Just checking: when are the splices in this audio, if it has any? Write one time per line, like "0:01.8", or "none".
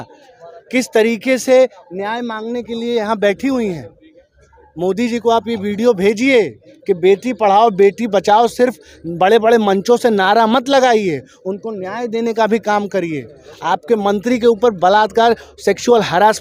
none